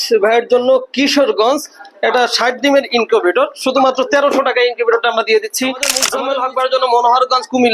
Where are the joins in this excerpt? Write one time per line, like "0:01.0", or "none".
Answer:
0:06.1